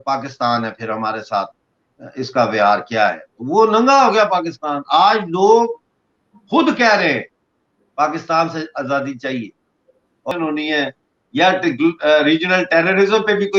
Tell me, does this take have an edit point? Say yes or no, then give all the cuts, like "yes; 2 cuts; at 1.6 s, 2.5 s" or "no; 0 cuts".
yes; 1 cut; at 10.3 s